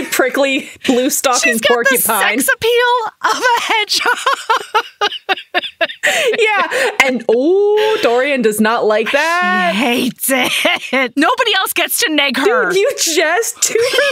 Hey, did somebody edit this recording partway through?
no; 0 cuts

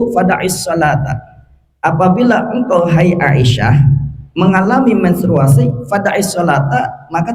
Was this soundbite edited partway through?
no; 0 cuts

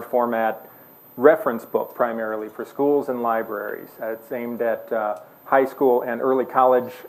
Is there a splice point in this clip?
yes; 1 cut; at 2.3 s

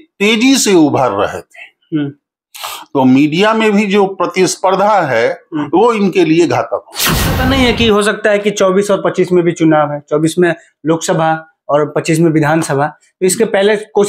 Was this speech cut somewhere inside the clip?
yes; 1 cut; at 7.4 s

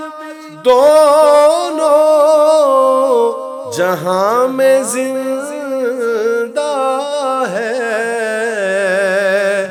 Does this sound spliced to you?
no; 0 cuts

